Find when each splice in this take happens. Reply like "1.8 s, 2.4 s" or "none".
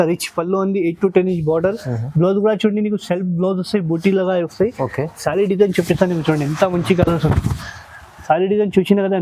none